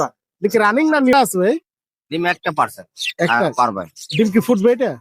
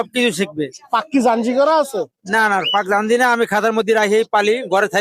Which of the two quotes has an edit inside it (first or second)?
first